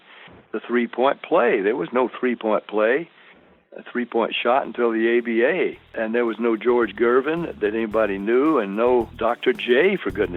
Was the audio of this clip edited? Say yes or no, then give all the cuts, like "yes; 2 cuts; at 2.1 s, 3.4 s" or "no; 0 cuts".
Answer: yes; 2 cuts; at 5.9 s, 9.1 s